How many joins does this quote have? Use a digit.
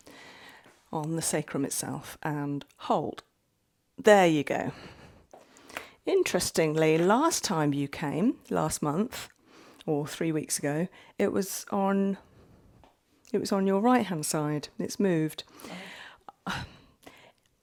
0